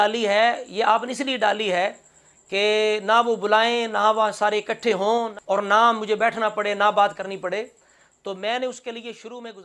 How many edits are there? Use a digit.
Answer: 1